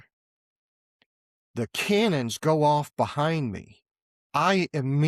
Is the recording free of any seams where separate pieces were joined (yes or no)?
yes